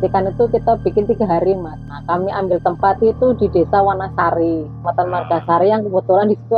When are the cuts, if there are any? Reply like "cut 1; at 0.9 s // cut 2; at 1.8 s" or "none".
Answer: cut 1; at 1.9 s // cut 2; at 4.8 s